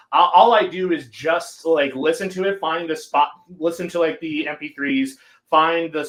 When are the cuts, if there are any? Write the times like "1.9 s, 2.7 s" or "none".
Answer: none